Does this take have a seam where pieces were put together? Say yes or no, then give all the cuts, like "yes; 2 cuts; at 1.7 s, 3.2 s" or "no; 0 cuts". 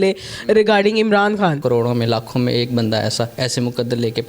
yes; 1 cut; at 1.6 s